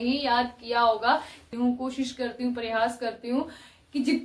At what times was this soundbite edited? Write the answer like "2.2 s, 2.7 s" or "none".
1.4 s